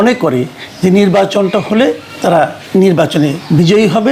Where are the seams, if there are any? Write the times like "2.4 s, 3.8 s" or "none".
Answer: 2.3 s